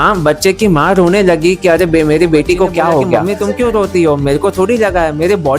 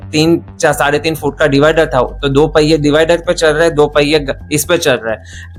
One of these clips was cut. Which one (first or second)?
first